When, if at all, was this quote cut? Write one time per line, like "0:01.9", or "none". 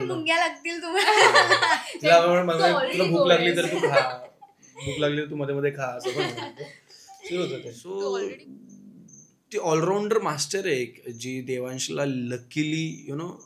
0:07.8